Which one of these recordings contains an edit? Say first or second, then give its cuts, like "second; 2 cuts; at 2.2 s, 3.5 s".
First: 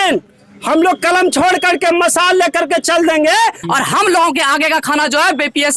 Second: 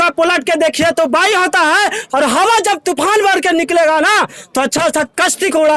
first; 1 cut; at 3.6 s